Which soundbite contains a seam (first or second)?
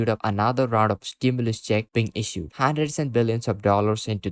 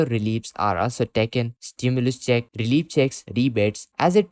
first